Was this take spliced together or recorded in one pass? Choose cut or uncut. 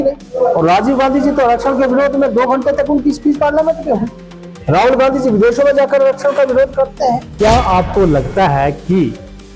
cut